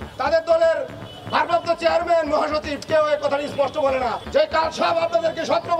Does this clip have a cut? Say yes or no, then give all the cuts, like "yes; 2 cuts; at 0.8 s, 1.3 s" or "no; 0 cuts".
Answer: yes; 1 cut; at 4.2 s